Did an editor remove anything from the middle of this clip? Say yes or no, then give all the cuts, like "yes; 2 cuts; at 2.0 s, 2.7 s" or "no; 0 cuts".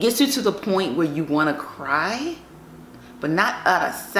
no; 0 cuts